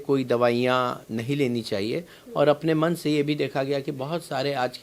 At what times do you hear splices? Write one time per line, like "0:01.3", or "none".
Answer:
none